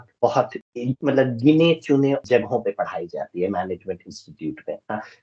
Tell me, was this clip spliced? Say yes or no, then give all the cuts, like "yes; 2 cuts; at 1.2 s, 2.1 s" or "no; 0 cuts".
no; 0 cuts